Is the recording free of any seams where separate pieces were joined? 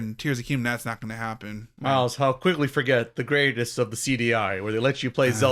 yes; 0 cuts

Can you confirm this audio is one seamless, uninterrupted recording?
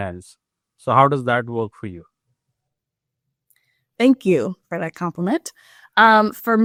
yes; 0 cuts

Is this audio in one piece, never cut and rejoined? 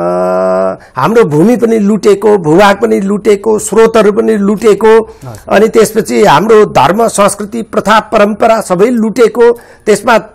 yes; 0 cuts

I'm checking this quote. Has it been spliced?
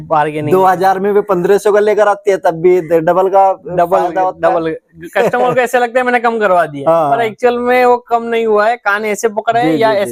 no; 0 cuts

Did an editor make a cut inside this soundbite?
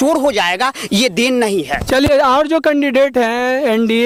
no; 0 cuts

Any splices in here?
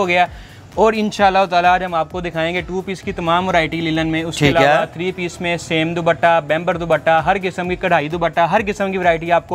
no; 0 cuts

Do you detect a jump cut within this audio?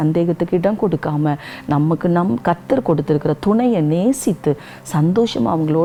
no; 0 cuts

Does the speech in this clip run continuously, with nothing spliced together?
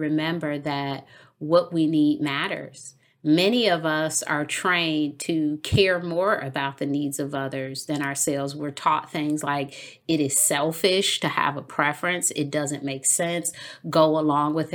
yes; 0 cuts

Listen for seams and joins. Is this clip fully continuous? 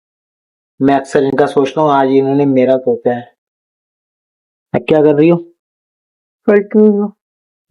yes; 0 cuts

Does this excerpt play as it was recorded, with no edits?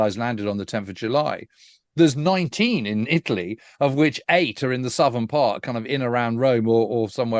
yes; 0 cuts

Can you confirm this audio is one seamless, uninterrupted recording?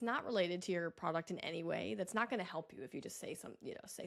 yes; 0 cuts

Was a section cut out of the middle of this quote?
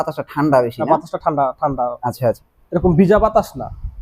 yes; 1 cut; at 2.4 s

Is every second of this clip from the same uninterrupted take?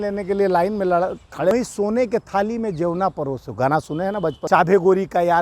no; 2 cuts; at 1.5 s, 4.4 s

